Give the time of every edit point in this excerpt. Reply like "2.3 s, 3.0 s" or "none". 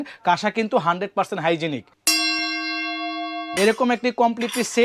1.9 s, 3.4 s